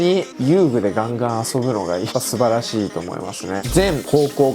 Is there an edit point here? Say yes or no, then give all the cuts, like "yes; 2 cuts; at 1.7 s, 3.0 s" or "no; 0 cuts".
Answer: yes; 2 cuts; at 2.1 s, 3.6 s